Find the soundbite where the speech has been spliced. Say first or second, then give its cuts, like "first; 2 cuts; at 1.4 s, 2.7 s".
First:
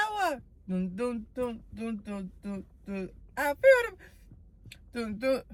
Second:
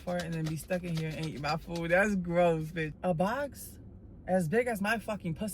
second; 1 cut; at 2.9 s